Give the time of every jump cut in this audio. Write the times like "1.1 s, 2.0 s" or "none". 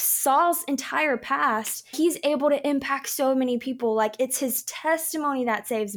1.9 s